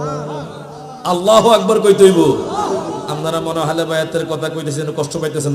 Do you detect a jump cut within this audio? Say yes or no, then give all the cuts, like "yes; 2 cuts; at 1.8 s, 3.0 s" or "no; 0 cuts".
no; 0 cuts